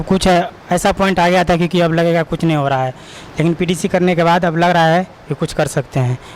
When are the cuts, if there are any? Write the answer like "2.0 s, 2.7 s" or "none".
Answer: none